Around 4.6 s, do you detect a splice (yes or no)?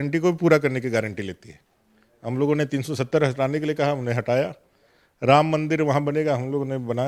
no